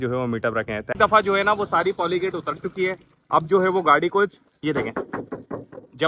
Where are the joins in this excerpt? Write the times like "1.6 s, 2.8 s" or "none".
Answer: 0.9 s